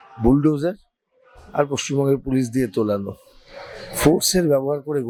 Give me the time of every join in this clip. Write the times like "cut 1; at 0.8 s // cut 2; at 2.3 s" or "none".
none

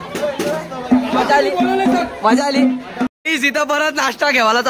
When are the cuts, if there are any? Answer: cut 1; at 3.2 s

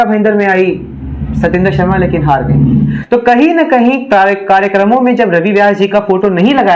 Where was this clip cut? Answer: cut 1; at 3.0 s

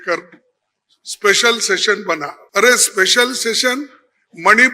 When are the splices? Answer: cut 1; at 2.3 s

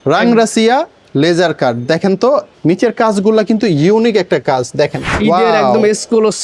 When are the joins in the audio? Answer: cut 1; at 2.5 s // cut 2; at 5.0 s

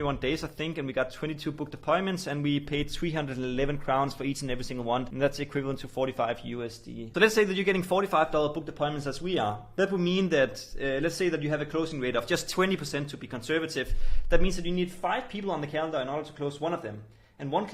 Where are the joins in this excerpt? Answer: cut 1; at 5.1 s // cut 2; at 7.0 s

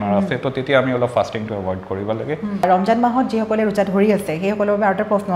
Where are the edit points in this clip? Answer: cut 1; at 2.6 s

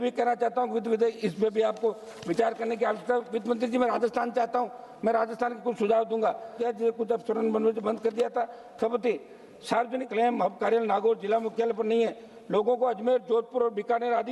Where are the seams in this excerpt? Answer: cut 1; at 1.1 s // cut 2; at 6.6 s // cut 3; at 10.1 s

